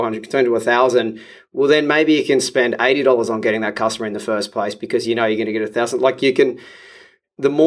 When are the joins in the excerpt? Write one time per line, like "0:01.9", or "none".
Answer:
none